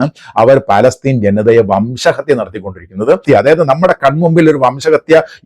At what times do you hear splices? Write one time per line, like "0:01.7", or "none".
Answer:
0:03.2